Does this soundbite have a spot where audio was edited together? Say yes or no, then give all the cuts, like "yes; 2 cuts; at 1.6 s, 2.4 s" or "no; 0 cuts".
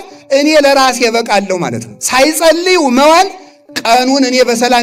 no; 0 cuts